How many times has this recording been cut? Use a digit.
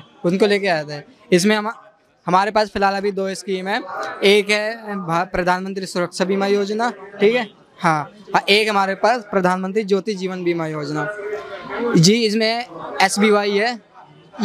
0